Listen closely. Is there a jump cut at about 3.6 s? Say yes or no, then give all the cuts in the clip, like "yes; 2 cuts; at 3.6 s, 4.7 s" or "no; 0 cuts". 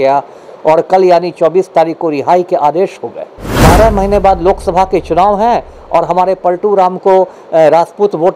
yes; 1 cut; at 3.6 s